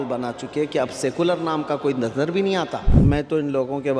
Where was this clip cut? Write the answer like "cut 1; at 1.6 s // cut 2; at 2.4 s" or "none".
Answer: cut 1; at 3.0 s